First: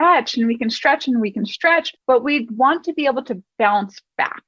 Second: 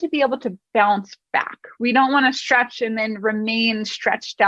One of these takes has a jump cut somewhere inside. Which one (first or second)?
first